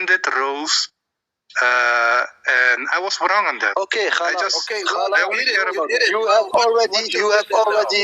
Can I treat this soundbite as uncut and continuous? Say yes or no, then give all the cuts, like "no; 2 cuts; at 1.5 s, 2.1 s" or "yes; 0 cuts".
yes; 0 cuts